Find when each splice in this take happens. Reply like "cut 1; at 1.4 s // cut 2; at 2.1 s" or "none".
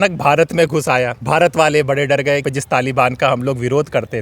cut 1; at 1.2 s // cut 2; at 2.4 s